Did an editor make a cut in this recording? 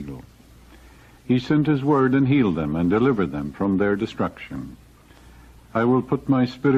no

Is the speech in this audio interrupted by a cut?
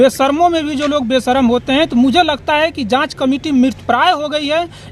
no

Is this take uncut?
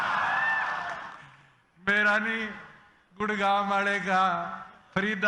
yes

